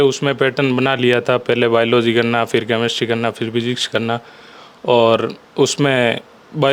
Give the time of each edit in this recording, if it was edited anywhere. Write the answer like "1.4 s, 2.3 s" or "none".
none